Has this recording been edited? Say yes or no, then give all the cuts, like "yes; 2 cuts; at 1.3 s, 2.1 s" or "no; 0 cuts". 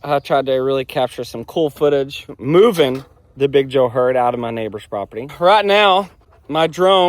yes; 2 cuts; at 2.3 s, 5.3 s